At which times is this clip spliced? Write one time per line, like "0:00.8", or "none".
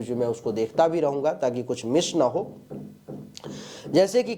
none